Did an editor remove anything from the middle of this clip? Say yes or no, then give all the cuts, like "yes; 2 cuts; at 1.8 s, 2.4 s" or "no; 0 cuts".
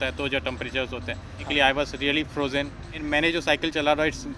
yes; 2 cuts; at 1.5 s, 3.0 s